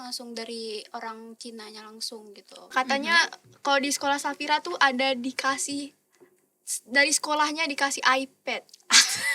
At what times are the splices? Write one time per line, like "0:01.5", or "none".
0:02.7